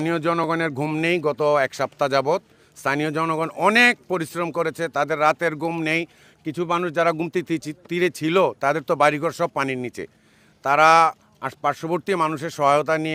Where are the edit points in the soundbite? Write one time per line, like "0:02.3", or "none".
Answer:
none